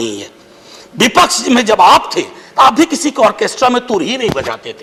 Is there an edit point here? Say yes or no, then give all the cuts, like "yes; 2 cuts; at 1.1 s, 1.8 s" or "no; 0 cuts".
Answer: no; 0 cuts